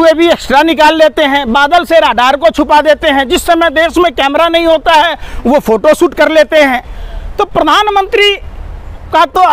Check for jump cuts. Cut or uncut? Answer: uncut